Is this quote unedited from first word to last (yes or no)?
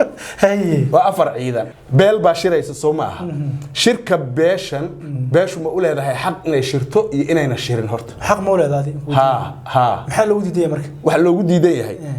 no